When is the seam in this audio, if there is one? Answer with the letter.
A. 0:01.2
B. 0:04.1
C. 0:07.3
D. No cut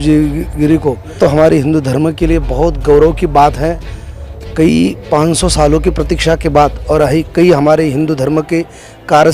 A